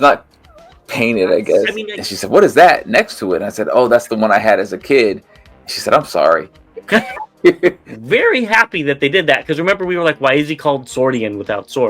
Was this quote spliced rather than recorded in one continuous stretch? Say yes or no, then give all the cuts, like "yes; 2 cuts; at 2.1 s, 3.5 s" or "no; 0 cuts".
yes; 2 cuts; at 1.9 s, 7.9 s